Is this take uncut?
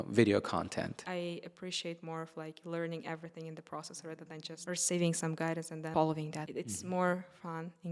no; 4 cuts; at 1.0 s, 4.6 s, 5.9 s, 6.4 s

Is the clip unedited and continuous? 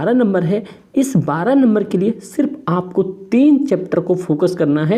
yes; 0 cuts

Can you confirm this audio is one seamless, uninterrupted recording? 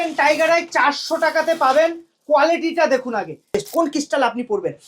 no; 1 cut; at 3.6 s

